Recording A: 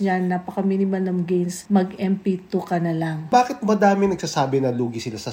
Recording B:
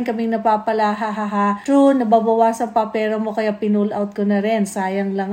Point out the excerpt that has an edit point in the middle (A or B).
A